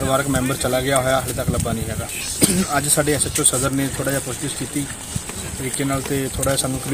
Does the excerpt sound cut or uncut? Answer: cut